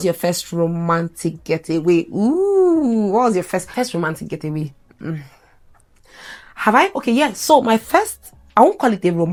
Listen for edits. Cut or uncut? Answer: uncut